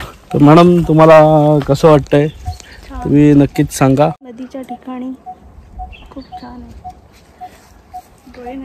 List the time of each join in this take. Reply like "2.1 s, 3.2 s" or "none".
4.3 s